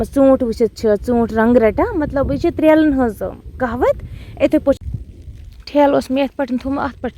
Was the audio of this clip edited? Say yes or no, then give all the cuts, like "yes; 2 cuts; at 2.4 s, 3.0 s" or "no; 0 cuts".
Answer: yes; 1 cut; at 4.8 s